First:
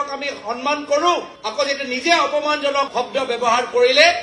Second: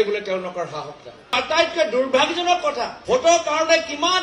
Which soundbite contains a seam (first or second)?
second